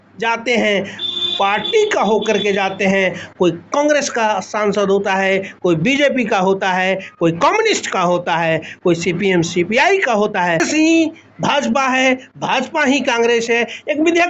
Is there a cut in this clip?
yes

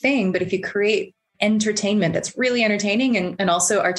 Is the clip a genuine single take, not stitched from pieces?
yes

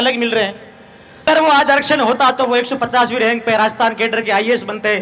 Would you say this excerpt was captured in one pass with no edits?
no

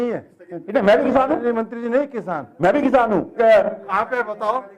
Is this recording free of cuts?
no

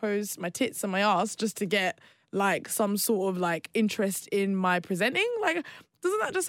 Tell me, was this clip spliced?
no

